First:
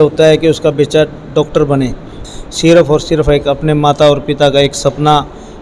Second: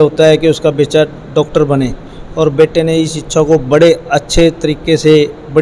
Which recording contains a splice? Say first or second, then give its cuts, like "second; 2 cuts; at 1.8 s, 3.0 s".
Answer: first; 1 cut; at 2.2 s